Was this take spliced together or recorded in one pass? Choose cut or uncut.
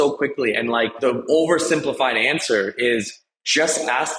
cut